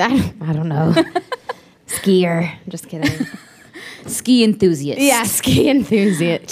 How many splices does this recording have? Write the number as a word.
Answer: one